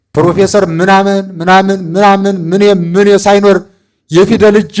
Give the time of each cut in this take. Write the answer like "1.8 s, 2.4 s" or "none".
none